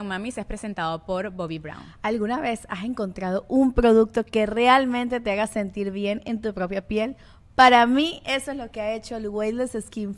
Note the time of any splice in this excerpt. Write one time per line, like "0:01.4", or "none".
none